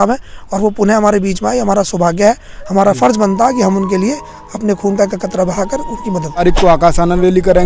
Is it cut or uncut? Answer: cut